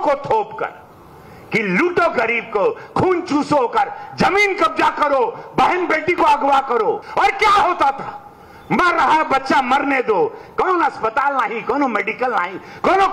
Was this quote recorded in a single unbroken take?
no; 1 cut; at 7.0 s

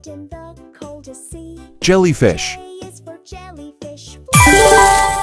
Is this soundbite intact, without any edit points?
no; 2 cuts; at 2.7 s, 4.3 s

